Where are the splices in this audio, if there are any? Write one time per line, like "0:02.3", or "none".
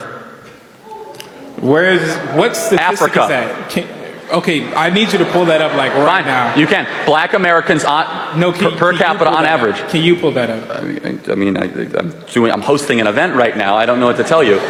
none

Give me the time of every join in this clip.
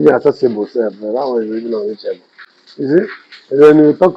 none

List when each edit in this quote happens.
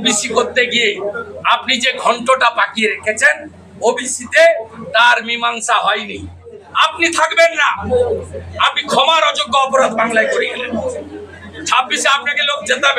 0:06.6

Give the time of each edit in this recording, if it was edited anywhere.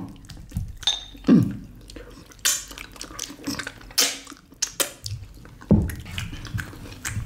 0:06.0

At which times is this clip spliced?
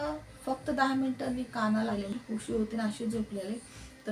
0:02.2

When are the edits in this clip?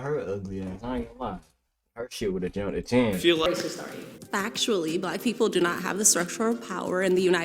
0:03.5

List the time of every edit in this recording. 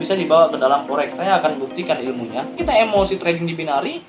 0:02.5

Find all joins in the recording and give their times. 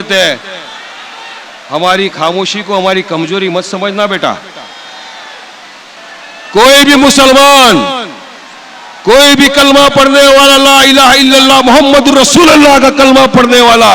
0:06.0

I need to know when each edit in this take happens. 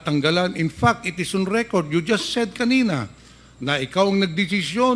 none

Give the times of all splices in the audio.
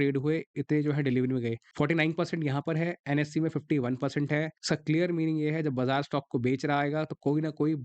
0:01.6
0:04.6

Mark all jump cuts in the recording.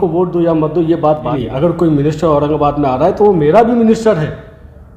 0:01.4

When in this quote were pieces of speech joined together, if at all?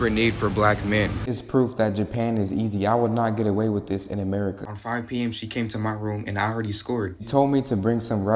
0:01.3
0:04.7
0:07.3

